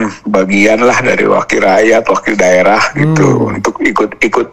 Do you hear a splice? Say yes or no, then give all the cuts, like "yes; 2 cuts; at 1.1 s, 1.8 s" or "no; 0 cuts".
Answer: no; 0 cuts